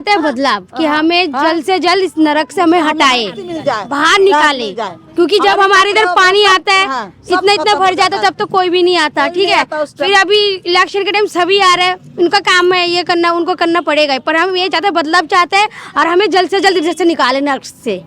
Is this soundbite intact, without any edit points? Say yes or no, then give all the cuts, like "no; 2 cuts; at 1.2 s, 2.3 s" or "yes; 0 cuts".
yes; 0 cuts